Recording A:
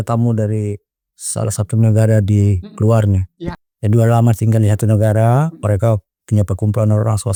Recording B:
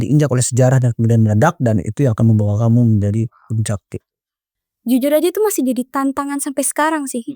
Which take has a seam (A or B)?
B